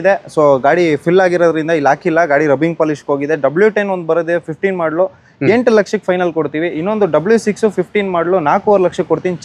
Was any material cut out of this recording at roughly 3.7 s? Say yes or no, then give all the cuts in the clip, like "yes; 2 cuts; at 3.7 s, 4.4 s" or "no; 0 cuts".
no; 0 cuts